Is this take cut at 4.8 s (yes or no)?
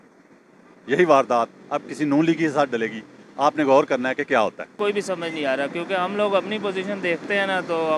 yes